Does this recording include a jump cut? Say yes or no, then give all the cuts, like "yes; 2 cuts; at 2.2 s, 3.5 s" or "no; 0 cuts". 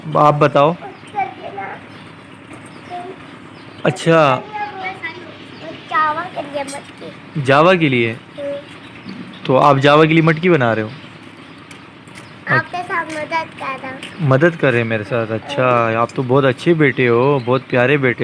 no; 0 cuts